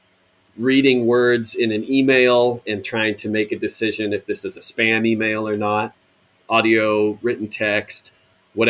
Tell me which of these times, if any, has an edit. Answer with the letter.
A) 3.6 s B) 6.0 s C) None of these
B